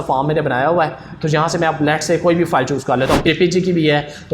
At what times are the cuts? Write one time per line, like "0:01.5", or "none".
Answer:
0:03.2